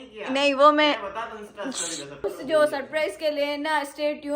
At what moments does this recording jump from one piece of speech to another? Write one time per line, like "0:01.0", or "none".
0:02.3

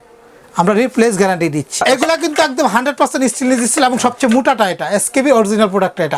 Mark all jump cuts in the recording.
0:01.8

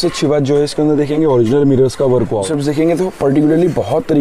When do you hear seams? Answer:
0:02.4

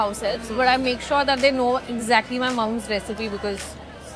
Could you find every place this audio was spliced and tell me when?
none

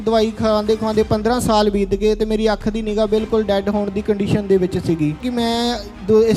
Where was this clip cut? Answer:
0:05.2

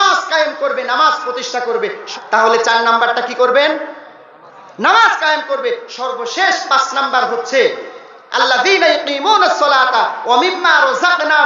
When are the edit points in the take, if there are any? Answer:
0:02.1

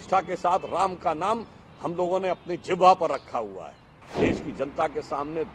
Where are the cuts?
0:04.0

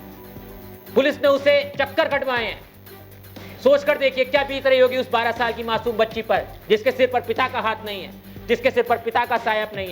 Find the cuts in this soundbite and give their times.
0:00.9

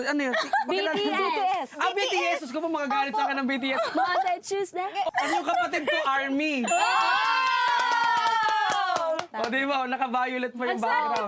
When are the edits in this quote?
0:05.1

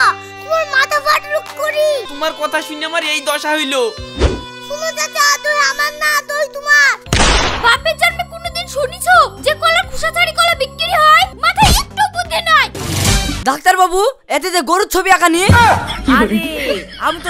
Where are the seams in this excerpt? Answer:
0:02.1
0:07.0
0:11.3
0:12.8

